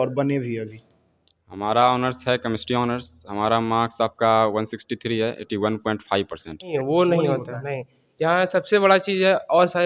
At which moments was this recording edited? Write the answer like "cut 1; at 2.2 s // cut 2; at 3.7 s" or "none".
cut 1; at 6.7 s